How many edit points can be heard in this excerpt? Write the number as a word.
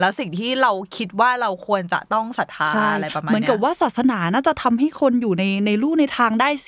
zero